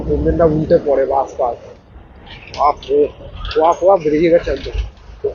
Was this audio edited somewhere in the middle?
no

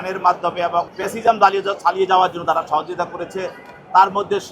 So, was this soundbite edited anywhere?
yes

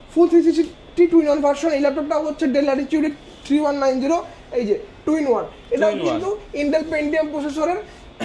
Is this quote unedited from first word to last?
yes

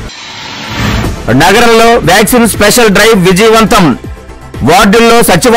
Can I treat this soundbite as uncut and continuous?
no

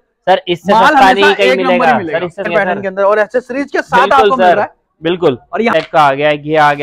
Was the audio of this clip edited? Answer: yes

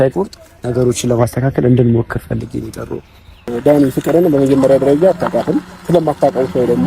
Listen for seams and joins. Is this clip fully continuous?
no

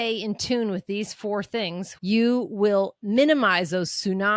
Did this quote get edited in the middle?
yes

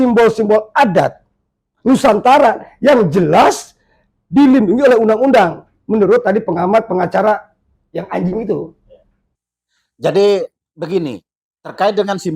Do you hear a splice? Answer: no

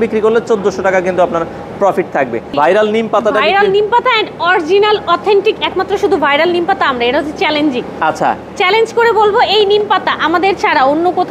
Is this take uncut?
no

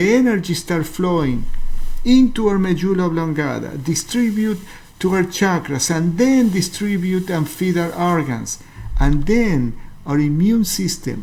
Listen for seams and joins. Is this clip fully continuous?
yes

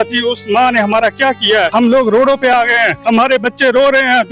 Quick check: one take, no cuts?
no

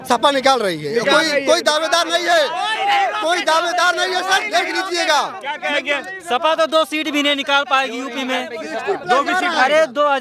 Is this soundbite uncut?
yes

